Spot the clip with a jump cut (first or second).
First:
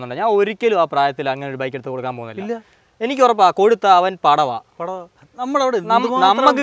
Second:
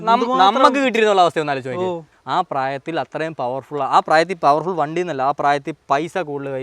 second